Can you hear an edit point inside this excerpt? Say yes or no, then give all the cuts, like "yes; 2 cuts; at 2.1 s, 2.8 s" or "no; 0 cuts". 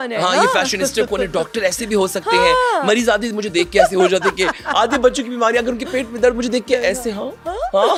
no; 0 cuts